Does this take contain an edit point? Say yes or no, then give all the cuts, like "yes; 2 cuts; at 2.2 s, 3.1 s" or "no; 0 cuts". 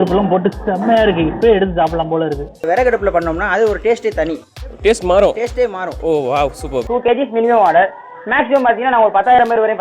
yes; 2 cuts; at 2.5 s, 6.8 s